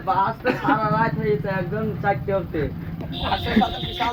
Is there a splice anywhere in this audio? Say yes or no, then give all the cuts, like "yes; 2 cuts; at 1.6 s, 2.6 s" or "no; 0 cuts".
no; 0 cuts